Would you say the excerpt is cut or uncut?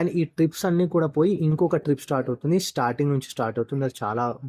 uncut